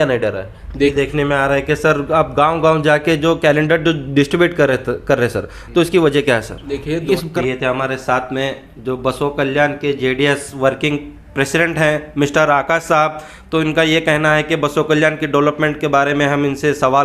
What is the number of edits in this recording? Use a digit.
2